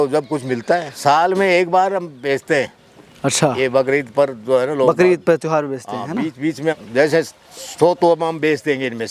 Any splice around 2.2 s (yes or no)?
no